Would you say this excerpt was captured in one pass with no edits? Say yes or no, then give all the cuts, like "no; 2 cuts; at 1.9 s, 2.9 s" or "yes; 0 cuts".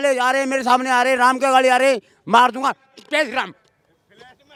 yes; 0 cuts